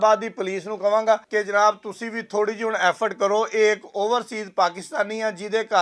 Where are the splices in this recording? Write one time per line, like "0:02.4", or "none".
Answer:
0:01.2